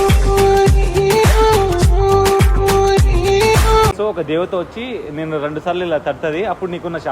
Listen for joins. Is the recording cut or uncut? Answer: cut